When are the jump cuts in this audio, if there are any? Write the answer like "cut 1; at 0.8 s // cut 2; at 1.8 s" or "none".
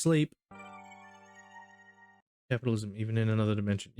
cut 1; at 2.2 s